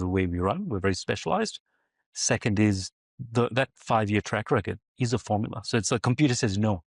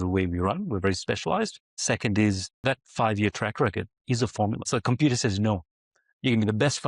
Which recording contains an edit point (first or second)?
second